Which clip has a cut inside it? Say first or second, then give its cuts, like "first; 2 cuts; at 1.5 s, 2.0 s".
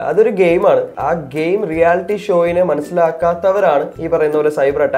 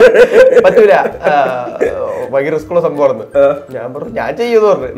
first; 2 cuts; at 0.9 s, 4.0 s